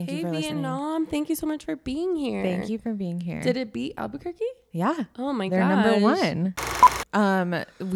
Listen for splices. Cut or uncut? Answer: cut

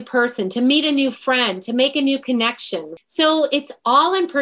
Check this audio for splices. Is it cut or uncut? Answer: cut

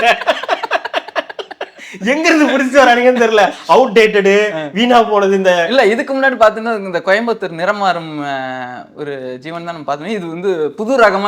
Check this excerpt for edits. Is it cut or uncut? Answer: uncut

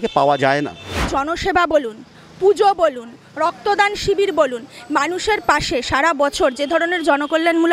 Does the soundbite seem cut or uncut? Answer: cut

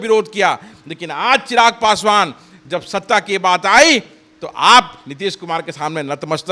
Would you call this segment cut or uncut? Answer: uncut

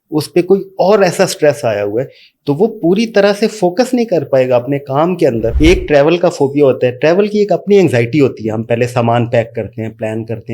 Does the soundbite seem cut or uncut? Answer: cut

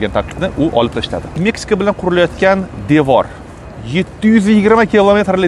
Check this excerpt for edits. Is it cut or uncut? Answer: uncut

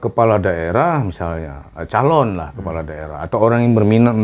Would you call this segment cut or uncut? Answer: uncut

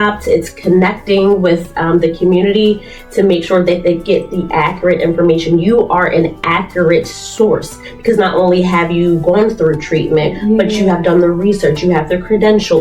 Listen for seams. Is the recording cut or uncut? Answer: uncut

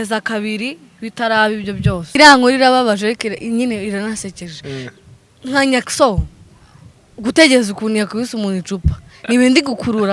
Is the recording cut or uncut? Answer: cut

